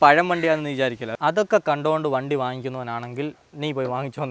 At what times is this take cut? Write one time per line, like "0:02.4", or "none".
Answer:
0:01.1